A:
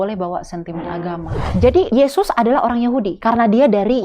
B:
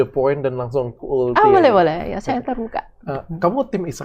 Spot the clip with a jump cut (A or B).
A